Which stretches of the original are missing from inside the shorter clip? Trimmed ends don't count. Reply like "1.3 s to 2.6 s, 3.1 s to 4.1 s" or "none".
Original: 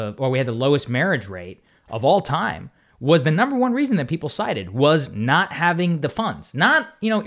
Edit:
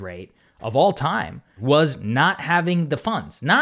2.8 s to 4.6 s